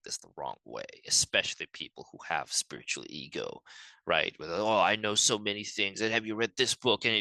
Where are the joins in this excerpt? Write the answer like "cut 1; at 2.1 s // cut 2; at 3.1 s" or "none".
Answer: none